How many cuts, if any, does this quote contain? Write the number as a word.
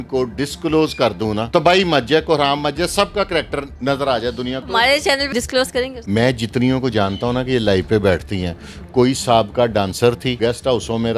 five